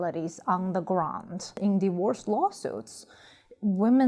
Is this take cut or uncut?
cut